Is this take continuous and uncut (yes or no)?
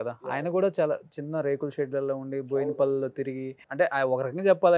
no